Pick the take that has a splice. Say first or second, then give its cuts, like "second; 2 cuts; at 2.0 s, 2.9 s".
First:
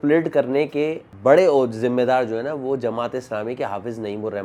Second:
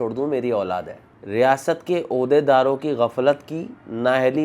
second; 1 cut; at 1.0 s